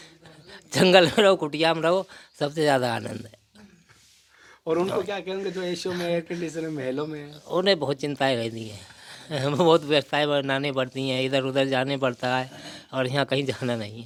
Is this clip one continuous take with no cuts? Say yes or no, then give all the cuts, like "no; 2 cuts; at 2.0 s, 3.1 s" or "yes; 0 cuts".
yes; 0 cuts